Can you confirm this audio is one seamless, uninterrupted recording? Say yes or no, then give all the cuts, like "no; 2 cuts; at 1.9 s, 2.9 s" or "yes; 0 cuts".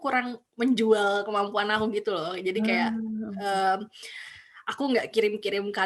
yes; 0 cuts